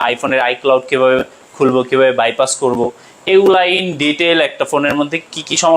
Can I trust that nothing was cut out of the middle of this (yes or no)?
yes